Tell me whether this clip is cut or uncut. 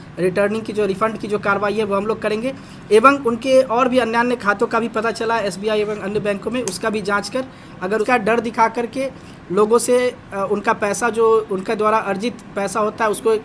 cut